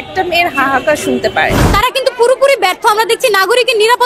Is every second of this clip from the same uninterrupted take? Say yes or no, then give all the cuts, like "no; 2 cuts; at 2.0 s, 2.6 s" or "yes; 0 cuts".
no; 1 cut; at 1.6 s